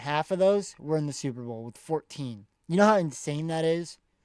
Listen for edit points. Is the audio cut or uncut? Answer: cut